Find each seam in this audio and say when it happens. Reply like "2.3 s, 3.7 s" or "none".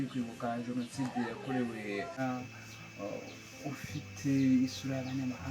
2.2 s